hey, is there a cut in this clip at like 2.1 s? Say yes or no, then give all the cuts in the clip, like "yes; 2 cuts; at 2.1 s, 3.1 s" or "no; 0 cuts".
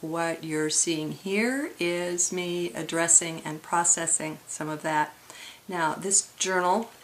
yes; 1 cut; at 2.1 s